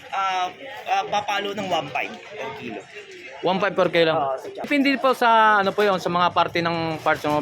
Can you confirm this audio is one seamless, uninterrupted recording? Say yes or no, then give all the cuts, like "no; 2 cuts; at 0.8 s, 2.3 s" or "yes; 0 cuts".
no; 1 cut; at 4.4 s